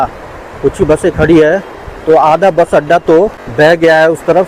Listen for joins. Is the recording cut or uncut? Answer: cut